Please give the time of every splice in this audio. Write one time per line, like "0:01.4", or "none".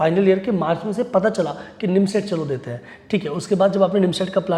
none